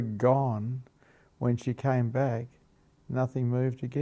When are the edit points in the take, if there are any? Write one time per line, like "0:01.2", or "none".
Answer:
none

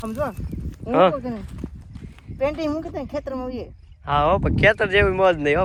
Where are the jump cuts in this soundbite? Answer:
none

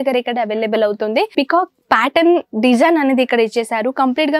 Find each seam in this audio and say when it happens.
0:01.3

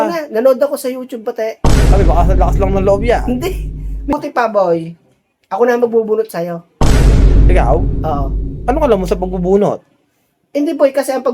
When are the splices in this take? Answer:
0:04.1

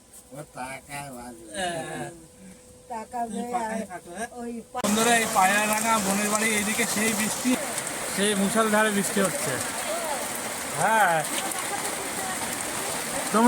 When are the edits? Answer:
0:04.8
0:07.6

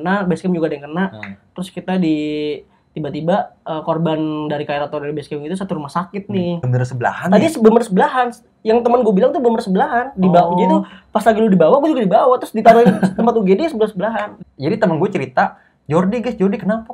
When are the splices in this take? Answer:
0:06.6
0:14.3

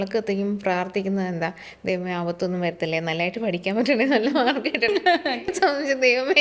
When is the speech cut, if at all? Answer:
none

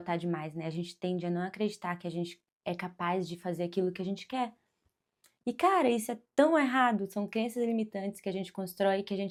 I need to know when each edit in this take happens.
none

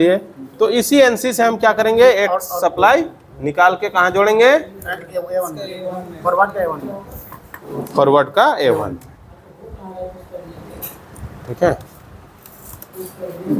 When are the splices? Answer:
none

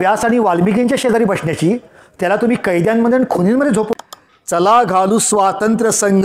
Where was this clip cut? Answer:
0:03.9

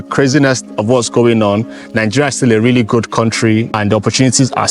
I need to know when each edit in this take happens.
0:03.7

